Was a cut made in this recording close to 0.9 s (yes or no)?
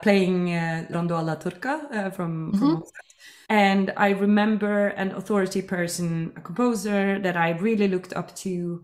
yes